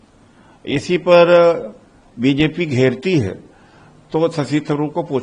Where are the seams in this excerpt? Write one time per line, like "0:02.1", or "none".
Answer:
none